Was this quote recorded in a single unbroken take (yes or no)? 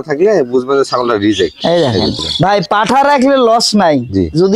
no